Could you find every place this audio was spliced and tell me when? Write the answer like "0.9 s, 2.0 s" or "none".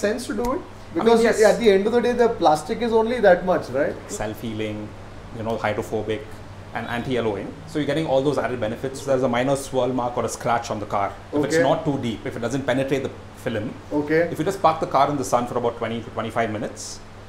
4.1 s, 9.0 s